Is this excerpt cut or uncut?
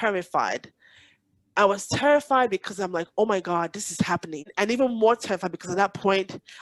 cut